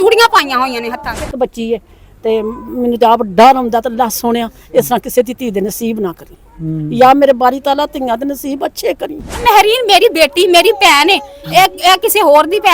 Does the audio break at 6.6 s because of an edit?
no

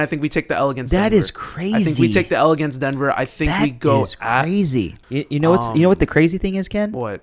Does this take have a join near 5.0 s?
yes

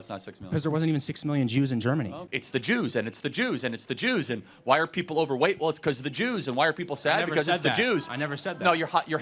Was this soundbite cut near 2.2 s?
yes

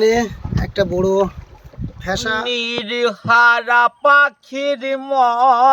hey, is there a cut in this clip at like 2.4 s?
yes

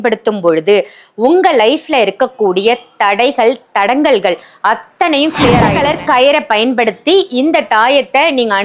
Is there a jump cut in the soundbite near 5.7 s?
yes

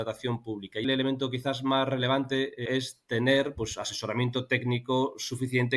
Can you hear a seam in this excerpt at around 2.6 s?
yes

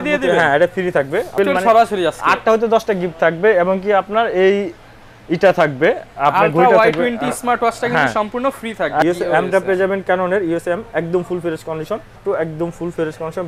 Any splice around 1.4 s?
yes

